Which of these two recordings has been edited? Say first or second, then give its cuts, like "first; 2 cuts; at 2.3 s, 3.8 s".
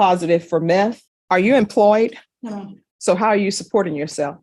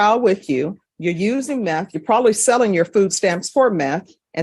first; 1 cut; at 1.0 s